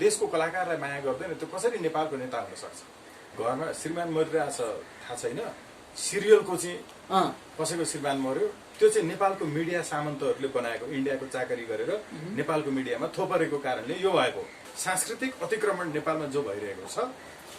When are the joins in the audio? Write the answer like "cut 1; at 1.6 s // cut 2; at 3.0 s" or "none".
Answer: cut 1; at 3.3 s // cut 2; at 8.6 s // cut 3; at 14.6 s